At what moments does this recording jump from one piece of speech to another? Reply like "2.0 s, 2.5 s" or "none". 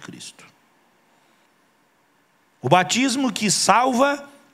1.3 s